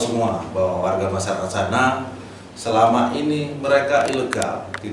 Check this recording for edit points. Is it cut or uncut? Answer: uncut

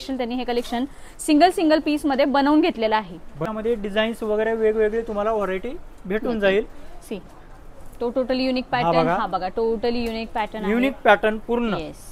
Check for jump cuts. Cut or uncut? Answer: uncut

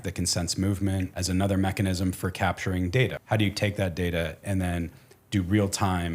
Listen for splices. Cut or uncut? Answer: cut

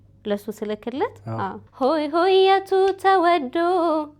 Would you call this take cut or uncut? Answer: cut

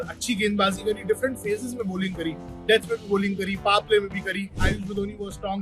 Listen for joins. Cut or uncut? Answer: cut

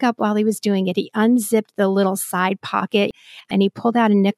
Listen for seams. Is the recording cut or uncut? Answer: cut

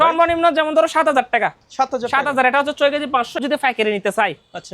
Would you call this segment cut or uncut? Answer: cut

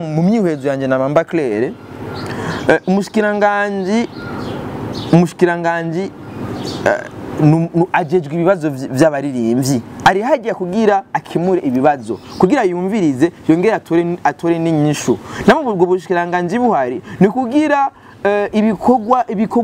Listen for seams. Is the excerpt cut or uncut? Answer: uncut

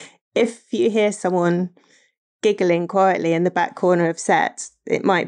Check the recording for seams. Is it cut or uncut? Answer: uncut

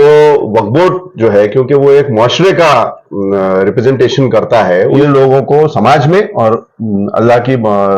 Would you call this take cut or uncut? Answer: cut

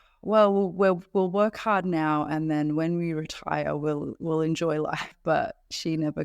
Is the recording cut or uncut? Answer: cut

